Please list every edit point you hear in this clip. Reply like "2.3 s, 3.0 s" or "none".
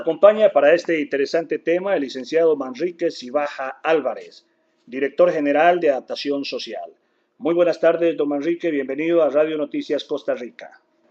8.3 s